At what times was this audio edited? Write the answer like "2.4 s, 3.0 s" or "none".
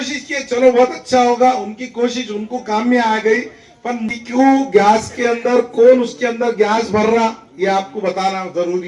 4.0 s